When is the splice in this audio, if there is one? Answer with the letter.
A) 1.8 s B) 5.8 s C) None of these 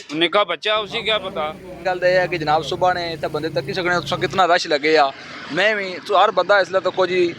A